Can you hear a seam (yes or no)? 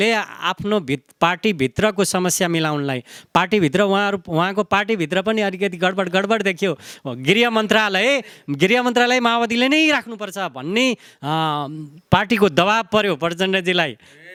no